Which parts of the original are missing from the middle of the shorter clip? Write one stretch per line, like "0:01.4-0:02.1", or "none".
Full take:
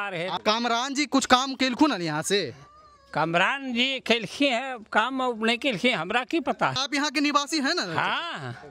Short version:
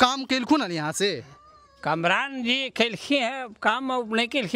none